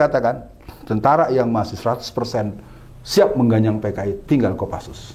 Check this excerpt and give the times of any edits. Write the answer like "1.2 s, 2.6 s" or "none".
none